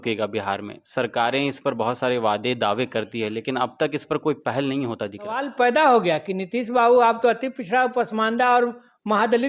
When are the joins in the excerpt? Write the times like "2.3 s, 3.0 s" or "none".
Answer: 5.5 s